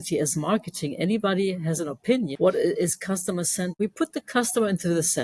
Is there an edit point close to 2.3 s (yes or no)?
yes